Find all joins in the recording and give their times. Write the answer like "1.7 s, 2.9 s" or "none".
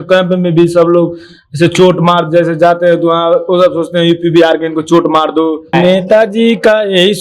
5.7 s